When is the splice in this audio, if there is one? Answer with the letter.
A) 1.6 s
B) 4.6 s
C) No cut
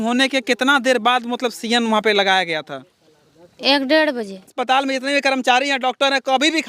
B